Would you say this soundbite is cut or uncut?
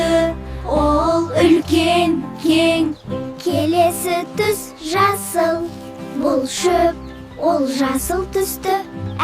cut